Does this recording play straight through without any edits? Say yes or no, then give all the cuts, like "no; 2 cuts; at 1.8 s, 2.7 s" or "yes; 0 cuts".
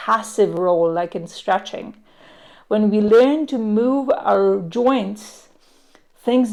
yes; 0 cuts